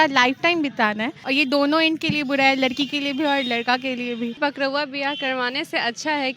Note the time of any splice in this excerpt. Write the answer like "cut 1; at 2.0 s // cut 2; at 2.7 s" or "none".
cut 1; at 1.2 s // cut 2; at 4.4 s